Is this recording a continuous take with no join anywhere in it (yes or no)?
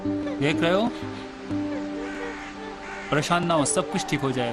no